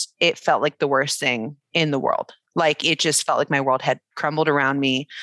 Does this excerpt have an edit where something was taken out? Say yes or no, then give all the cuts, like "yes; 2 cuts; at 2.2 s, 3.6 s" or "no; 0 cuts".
no; 0 cuts